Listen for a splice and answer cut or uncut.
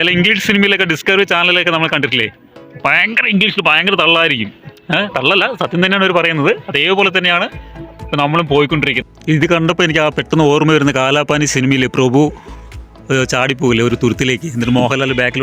cut